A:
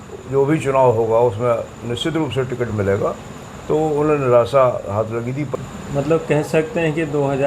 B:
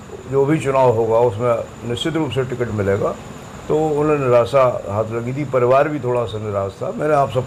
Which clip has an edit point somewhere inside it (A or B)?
A